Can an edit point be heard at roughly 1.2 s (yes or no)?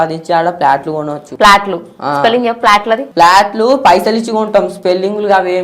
yes